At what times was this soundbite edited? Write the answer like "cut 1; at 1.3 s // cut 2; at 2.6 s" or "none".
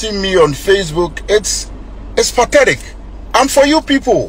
none

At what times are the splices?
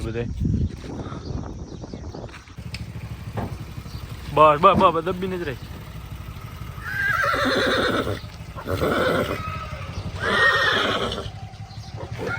cut 1; at 2.6 s

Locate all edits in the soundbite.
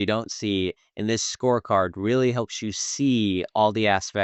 none

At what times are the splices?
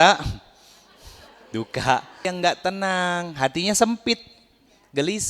cut 1; at 2.3 s

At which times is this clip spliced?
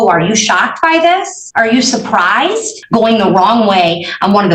cut 1; at 1.4 s // cut 2; at 2.8 s

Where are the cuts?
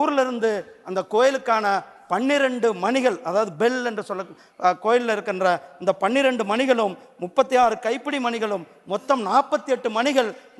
none

